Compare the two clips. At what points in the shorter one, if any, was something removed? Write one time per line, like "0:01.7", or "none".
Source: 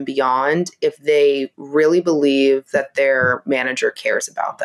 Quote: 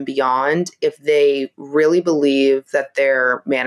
none